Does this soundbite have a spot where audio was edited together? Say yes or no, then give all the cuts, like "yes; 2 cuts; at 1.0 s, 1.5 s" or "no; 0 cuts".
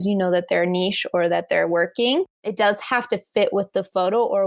yes; 1 cut; at 2.4 s